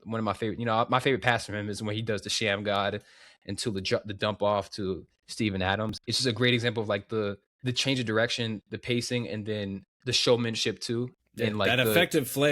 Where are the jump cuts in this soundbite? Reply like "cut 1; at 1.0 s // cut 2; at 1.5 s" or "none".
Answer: cut 1; at 5.9 s // cut 2; at 7.5 s // cut 3; at 9.9 s // cut 4; at 11.2 s